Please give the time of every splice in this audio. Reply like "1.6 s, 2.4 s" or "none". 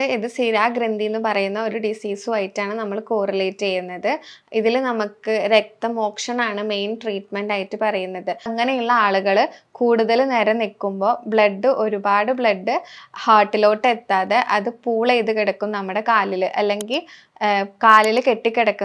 8.5 s